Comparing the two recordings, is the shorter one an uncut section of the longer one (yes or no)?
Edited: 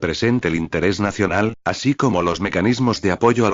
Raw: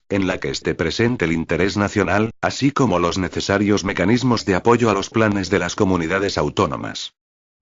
no